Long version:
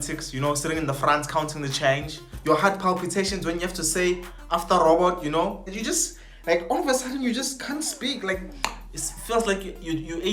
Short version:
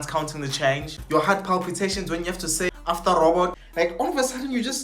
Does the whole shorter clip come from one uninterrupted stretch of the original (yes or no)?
no